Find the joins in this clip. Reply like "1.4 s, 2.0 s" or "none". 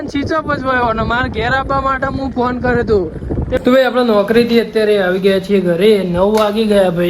3.6 s